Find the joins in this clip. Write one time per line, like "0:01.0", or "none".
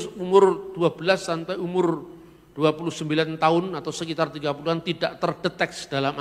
none